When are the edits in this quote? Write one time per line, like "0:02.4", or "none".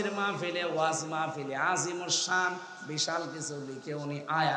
none